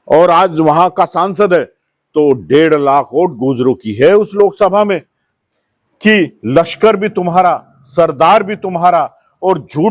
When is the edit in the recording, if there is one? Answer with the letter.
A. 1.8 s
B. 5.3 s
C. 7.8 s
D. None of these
B